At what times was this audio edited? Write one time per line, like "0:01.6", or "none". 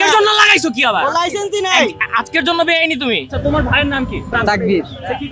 0:03.4
0:04.3